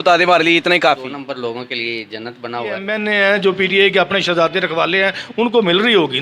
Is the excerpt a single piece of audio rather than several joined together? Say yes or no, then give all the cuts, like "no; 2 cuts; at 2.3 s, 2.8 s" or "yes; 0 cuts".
no; 2 cuts; at 1.2 s, 2.9 s